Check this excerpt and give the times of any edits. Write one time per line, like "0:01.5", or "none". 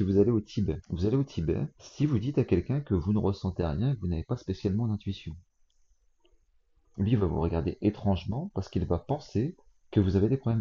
0:00.9
0:01.8

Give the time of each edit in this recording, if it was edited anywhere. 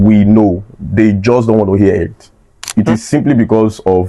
0:02.6

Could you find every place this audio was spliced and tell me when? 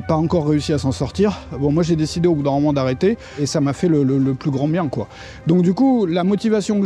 0:03.4

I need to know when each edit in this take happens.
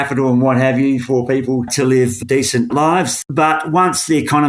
0:03.2

